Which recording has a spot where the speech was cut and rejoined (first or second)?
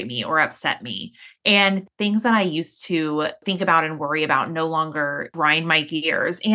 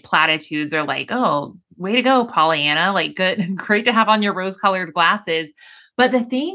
first